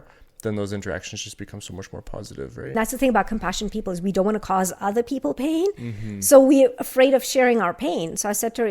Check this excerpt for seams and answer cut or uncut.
cut